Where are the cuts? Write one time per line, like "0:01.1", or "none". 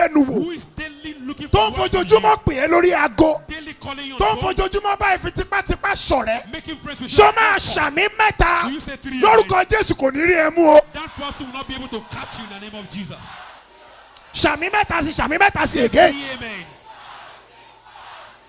none